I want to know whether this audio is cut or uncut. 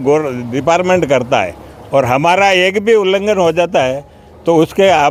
uncut